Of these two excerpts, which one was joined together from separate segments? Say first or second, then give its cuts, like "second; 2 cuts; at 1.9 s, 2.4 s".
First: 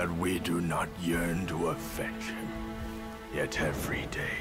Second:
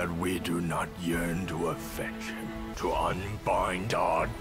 second; 1 cut; at 2.7 s